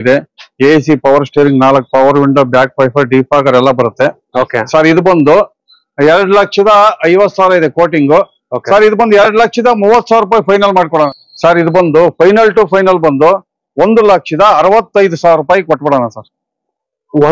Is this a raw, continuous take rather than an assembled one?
no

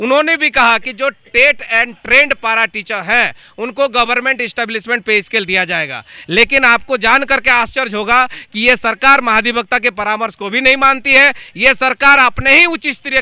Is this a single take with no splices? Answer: yes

